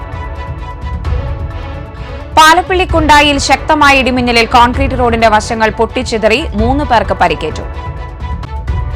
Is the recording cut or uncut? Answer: uncut